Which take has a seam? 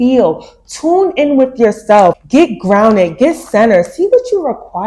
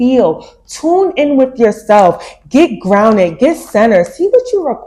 first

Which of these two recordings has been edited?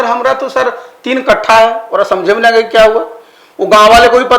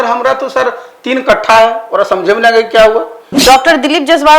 second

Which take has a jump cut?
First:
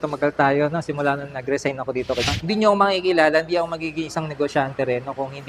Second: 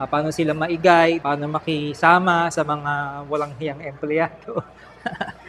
first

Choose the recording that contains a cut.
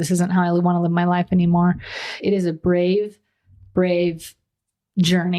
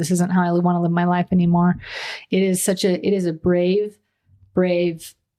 first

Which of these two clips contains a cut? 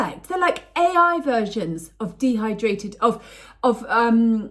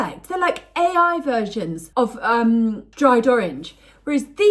second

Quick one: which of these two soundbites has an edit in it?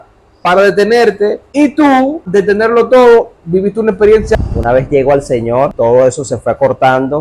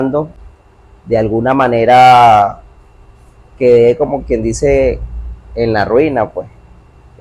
first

